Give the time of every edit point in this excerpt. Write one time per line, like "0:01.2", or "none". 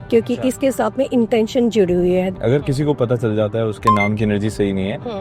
0:02.3